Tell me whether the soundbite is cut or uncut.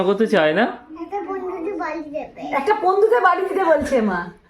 uncut